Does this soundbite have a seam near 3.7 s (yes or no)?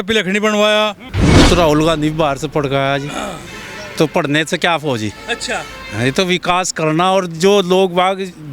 no